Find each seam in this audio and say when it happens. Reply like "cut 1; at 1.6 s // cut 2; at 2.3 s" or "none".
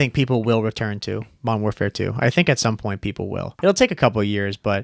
cut 1; at 3.6 s

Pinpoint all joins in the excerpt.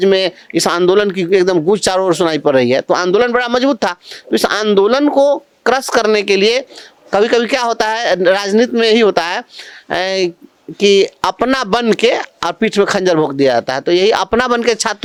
none

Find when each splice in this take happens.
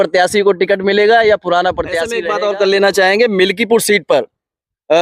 cut 1; at 2.1 s

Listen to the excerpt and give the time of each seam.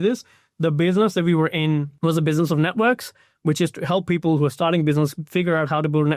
cut 1; at 1.9 s

